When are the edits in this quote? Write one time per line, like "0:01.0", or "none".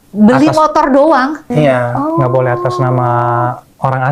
0:01.5